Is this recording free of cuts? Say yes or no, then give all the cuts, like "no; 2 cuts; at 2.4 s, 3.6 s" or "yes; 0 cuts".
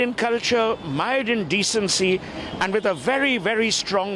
yes; 0 cuts